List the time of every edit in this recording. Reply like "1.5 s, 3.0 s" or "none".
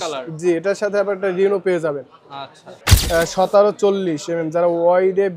2.9 s